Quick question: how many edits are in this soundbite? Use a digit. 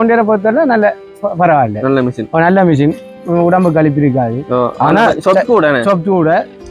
0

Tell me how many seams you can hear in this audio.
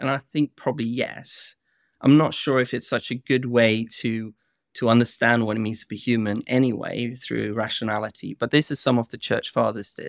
0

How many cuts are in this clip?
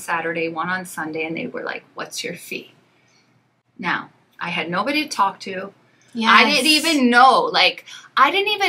0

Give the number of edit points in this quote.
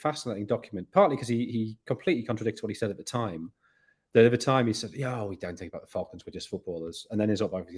0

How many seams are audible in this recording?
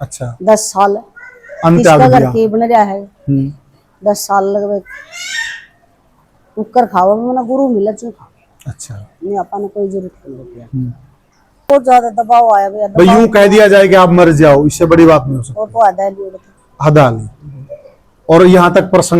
1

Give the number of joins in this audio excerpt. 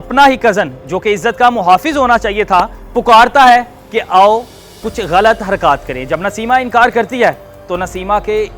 0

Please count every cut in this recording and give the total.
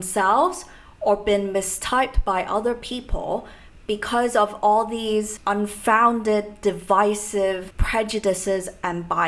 2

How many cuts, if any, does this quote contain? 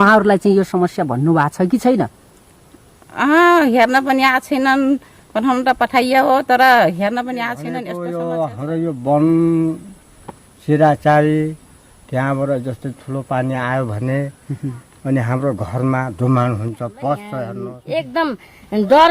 2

